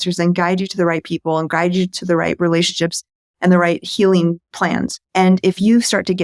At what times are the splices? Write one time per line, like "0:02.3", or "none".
0:04.6